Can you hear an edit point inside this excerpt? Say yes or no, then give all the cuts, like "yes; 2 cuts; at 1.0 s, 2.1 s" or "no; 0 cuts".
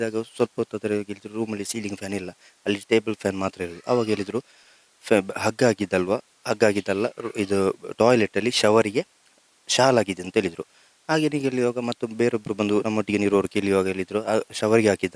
no; 0 cuts